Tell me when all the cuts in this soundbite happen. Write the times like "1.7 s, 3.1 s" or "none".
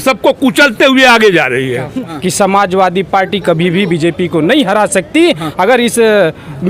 2.2 s